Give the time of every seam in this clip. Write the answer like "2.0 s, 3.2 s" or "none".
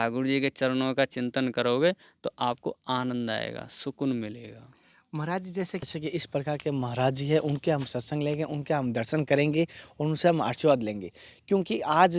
5.9 s